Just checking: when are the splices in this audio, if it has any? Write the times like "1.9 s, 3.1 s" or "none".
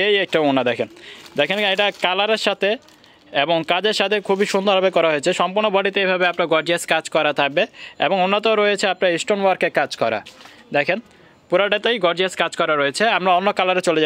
none